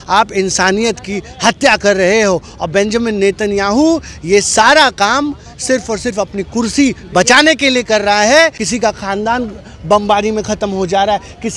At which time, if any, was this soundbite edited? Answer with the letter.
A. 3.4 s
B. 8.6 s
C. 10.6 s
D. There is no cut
B